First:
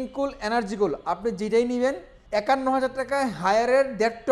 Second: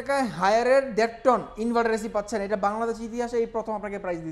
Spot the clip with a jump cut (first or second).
first